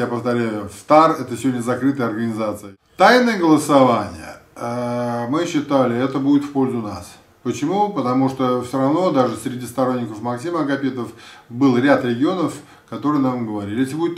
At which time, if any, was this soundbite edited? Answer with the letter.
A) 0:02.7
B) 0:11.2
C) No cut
A